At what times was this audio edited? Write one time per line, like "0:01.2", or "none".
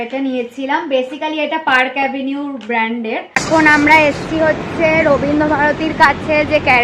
0:03.4